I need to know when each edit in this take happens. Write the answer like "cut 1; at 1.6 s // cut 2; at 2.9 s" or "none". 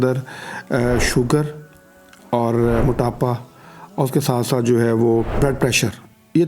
cut 1; at 5.4 s